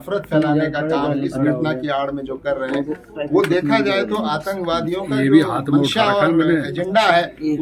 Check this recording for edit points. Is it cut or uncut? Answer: uncut